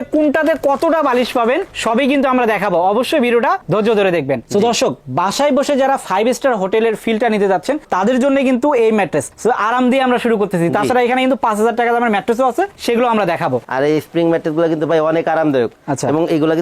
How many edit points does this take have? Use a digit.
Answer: 2